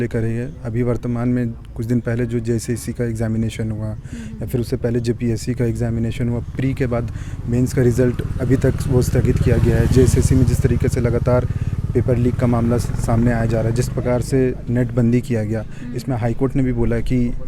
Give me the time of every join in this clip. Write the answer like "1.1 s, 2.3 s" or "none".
none